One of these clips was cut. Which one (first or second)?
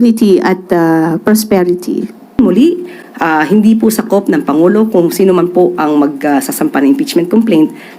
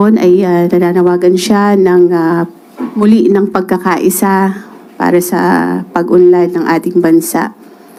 first